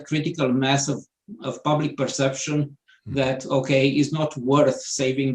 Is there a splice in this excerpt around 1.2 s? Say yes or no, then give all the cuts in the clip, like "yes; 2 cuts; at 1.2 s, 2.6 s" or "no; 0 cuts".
no; 0 cuts